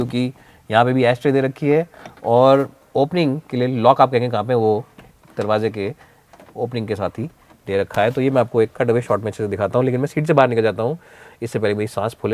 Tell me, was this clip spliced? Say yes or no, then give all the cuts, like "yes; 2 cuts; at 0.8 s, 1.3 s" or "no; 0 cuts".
no; 0 cuts